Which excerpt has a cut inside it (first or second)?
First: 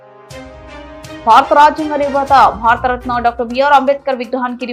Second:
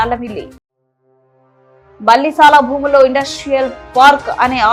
first